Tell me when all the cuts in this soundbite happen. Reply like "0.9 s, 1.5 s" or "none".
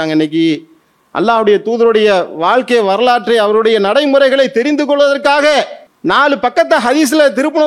5.8 s